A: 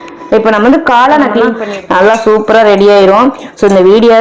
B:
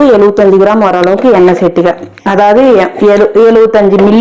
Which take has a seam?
A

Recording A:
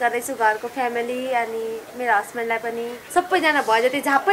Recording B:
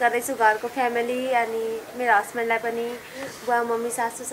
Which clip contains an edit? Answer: A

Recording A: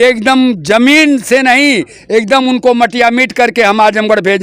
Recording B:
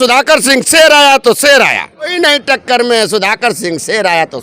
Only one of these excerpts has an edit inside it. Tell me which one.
B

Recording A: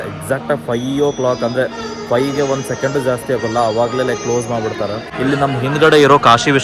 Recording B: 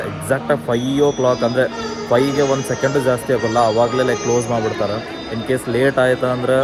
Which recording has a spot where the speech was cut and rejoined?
A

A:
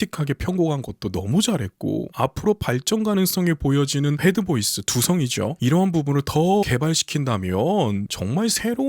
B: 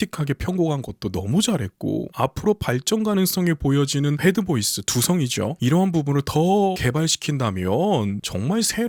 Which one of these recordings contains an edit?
A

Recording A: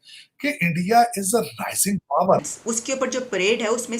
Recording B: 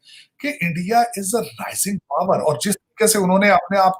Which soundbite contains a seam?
A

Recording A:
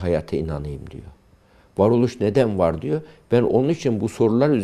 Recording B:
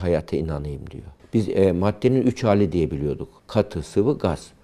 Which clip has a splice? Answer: B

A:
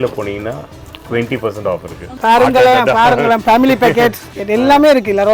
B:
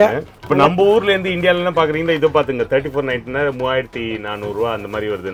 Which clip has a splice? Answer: A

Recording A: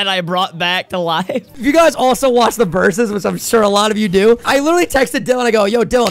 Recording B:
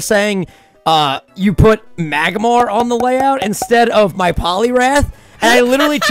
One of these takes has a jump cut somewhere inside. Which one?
A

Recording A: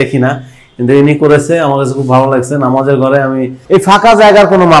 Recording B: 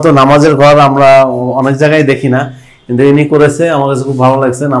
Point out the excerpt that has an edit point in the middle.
A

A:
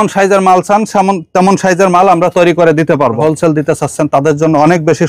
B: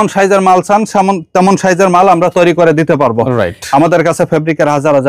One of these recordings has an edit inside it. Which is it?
A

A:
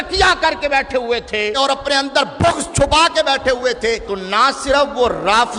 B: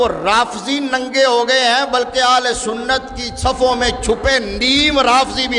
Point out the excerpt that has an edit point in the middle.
A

